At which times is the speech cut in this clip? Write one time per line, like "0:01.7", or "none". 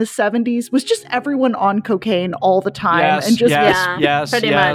none

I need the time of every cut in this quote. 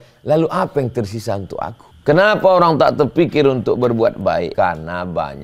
0:01.9
0:04.5

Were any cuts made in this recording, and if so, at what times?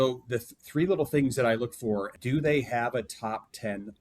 0:02.1

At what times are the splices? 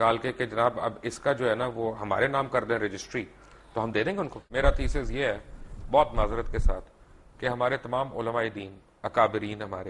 0:04.4

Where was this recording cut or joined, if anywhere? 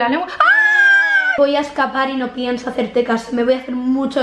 0:01.4

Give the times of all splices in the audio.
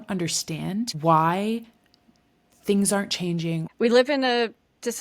0:00.9
0:03.7

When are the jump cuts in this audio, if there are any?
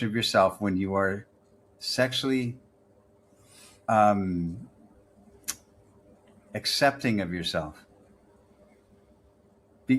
none

